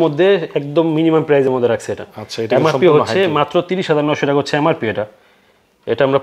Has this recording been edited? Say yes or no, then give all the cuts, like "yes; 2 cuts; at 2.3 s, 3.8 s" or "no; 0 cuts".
no; 0 cuts